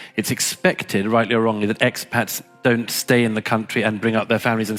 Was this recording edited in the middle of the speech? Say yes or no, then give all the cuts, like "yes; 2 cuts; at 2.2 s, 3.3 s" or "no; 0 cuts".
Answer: no; 0 cuts